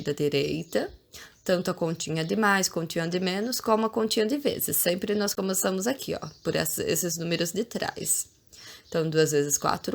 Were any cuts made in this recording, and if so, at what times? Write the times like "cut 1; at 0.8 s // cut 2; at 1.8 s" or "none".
none